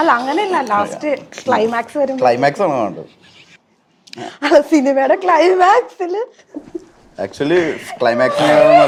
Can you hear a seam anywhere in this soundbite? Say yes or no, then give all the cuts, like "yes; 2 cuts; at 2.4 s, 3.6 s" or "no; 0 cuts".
no; 0 cuts